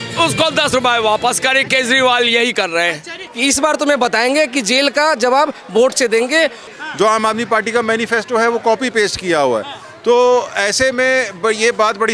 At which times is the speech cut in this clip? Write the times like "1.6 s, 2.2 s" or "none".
3.3 s, 6.6 s